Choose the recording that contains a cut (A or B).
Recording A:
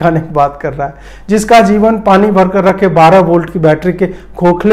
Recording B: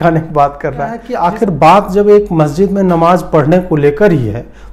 B